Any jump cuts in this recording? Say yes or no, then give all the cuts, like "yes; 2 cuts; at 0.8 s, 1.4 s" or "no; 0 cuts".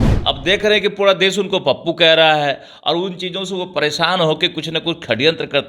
no; 0 cuts